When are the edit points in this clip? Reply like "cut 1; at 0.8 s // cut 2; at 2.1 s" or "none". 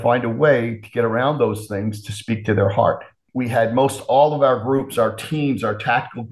cut 1; at 3.2 s

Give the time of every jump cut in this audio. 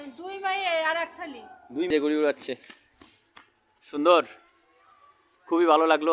cut 1; at 1.9 s

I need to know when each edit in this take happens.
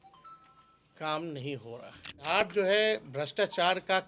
cut 1; at 2.3 s

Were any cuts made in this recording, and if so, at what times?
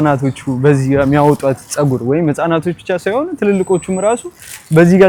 none

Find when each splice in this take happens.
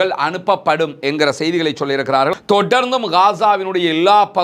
cut 1; at 2.4 s

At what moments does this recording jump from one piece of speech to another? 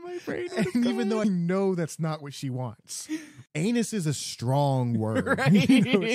cut 1; at 1.2 s // cut 2; at 3.4 s

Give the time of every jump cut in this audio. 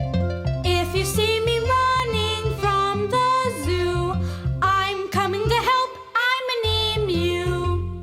cut 1; at 2.9 s

